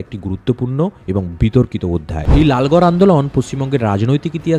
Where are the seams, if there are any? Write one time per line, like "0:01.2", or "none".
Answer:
0:02.2